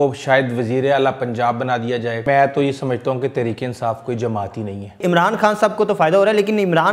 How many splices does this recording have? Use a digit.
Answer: 2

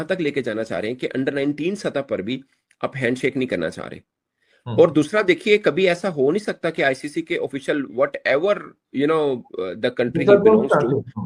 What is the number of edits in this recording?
0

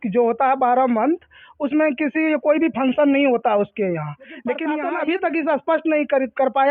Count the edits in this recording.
1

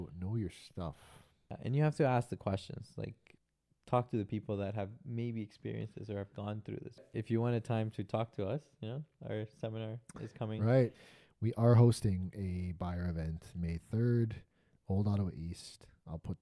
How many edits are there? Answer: 4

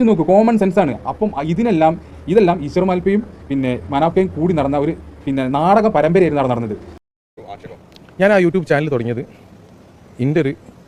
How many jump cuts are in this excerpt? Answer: 1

